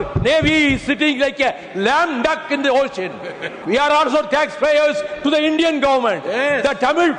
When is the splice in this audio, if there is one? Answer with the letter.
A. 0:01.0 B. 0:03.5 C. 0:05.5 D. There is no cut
B